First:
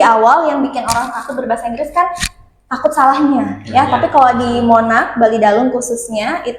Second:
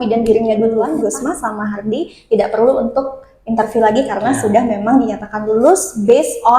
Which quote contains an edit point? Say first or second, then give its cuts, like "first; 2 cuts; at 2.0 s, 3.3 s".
second; 1 cut; at 0.9 s